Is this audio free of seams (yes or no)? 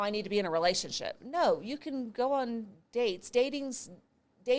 yes